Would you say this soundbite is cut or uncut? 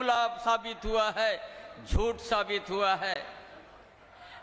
uncut